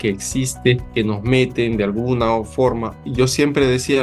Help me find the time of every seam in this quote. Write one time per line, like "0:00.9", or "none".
0:00.9
0:03.0

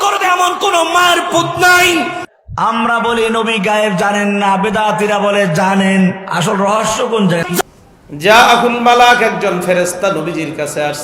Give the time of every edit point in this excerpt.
0:07.6

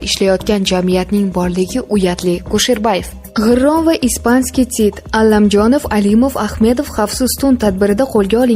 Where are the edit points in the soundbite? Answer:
0:03.2

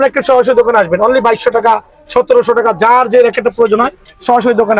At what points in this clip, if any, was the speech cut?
none

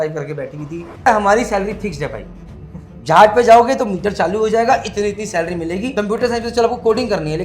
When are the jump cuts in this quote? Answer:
0:01.1
0:05.9

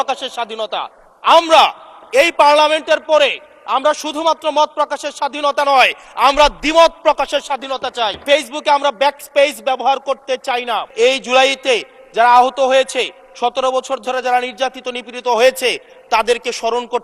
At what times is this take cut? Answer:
0:08.2
0:10.9

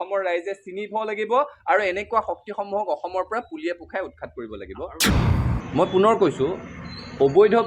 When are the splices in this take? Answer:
0:05.1

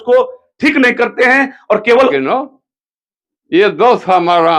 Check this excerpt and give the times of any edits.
0:02.1

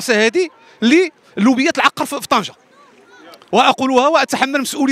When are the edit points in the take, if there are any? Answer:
none

